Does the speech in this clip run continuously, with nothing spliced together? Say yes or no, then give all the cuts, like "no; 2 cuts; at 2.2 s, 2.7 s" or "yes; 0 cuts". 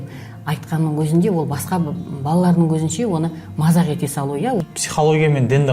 no; 1 cut; at 4.6 s